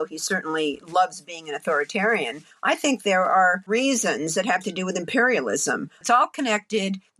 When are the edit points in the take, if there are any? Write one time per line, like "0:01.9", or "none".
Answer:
0:03.7
0:06.0